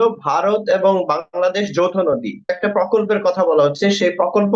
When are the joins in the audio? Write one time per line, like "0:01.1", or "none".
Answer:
0:02.6